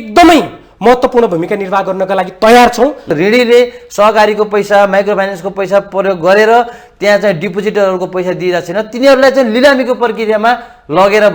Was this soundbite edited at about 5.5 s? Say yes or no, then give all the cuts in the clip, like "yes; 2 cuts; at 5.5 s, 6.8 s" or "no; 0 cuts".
no; 1 cut; at 3.1 s